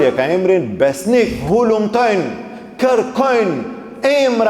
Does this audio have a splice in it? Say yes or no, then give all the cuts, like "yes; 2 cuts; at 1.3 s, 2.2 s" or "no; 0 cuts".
yes; 1 cut; at 1.4 s